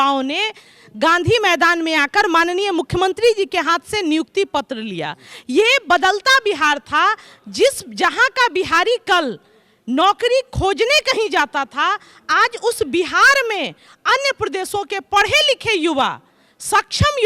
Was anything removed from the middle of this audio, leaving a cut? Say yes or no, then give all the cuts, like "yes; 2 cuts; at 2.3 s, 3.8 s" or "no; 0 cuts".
no; 0 cuts